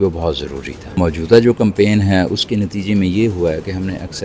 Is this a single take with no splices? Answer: no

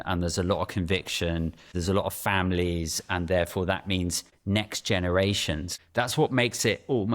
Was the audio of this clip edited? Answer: yes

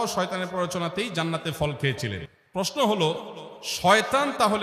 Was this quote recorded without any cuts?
yes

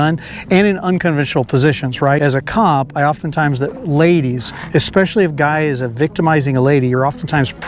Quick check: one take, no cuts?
no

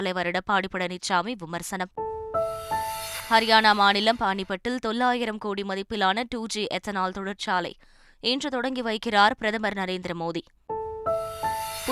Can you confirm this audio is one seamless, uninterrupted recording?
yes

